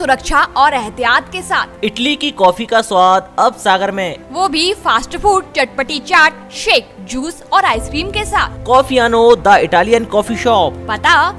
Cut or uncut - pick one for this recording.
uncut